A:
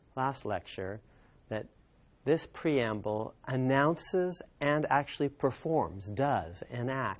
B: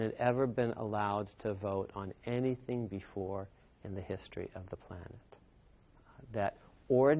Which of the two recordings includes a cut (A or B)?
B